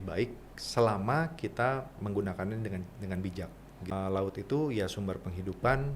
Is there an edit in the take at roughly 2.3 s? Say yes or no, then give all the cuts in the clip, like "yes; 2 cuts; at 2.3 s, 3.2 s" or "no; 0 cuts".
no; 1 cut; at 3.9 s